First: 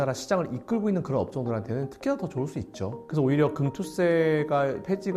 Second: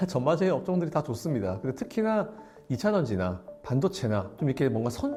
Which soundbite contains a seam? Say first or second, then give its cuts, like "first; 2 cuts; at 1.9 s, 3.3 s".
first; 1 cut; at 3.0 s